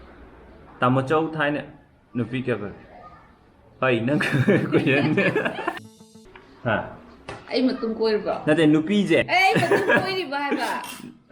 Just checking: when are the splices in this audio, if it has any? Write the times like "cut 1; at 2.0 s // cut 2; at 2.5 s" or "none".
cut 1; at 5.9 s // cut 2; at 9.3 s